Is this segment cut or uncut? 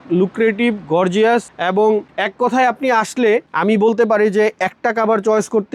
uncut